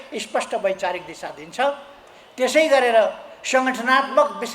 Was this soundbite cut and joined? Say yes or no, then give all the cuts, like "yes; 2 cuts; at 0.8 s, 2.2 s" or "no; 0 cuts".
no; 0 cuts